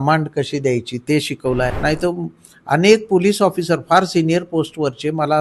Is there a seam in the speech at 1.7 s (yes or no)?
yes